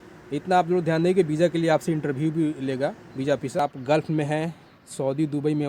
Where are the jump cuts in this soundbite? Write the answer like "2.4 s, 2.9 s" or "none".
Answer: 3.6 s